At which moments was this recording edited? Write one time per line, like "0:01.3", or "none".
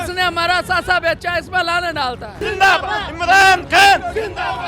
0:02.4